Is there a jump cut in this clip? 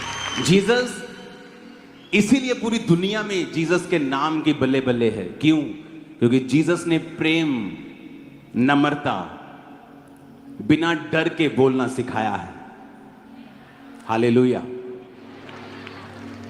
no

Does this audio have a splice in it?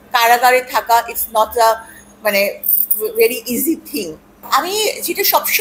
yes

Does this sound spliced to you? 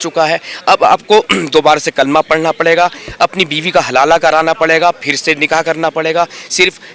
no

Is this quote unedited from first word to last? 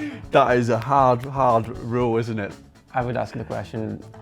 no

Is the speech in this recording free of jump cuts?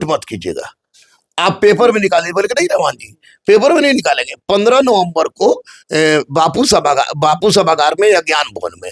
yes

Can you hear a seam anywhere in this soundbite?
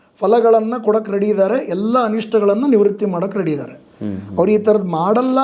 no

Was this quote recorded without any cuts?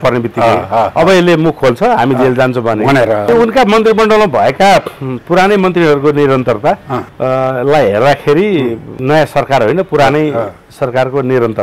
no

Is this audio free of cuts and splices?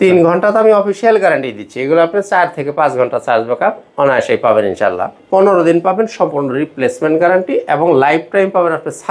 no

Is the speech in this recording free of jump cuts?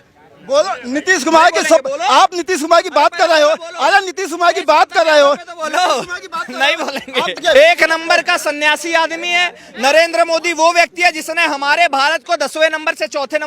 no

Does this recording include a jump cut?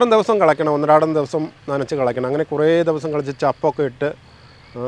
no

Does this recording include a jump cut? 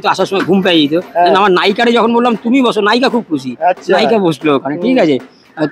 no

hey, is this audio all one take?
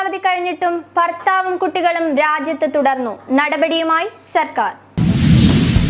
no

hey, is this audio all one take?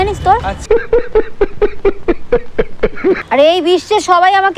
no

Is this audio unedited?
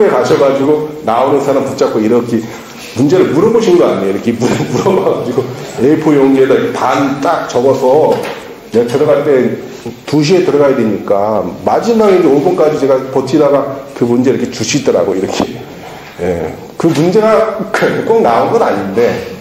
yes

